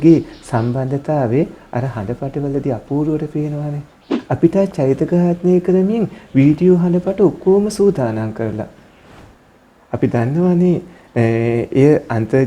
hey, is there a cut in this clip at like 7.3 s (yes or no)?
no